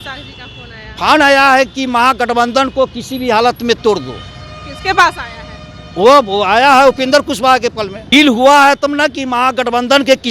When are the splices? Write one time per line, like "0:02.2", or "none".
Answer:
0:08.0